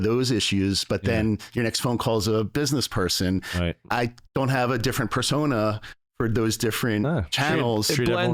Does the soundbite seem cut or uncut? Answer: cut